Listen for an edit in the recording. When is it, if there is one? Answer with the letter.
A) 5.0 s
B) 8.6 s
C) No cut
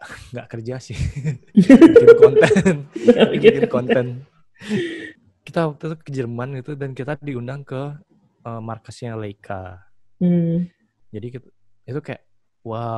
A